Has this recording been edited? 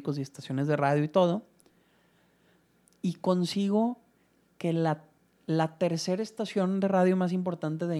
no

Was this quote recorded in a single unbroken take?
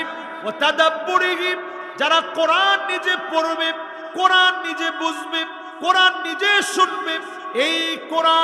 yes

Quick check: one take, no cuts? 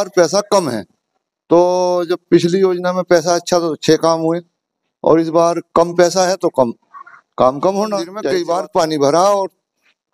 no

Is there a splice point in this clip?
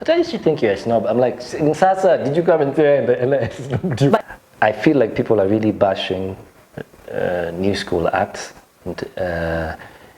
yes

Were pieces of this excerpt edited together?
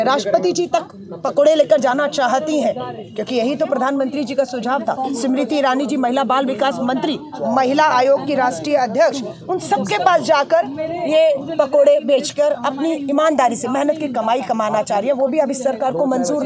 no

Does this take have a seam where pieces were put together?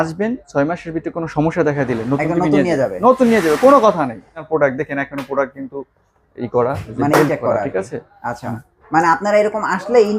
yes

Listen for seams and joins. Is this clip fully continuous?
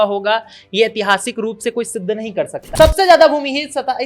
no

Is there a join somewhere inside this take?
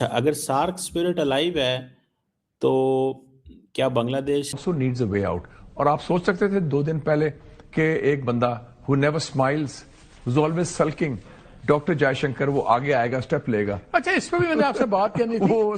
yes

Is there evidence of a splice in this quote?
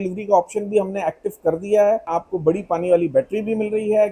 yes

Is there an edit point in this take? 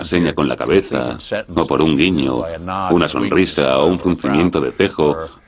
yes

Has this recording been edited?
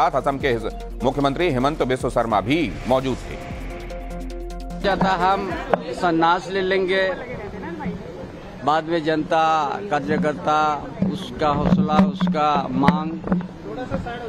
yes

